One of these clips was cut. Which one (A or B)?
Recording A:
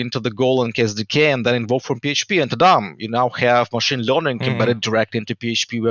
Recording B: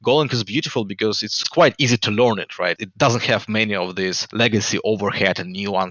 B